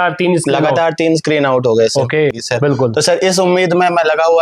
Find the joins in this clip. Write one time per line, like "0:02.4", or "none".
0:02.4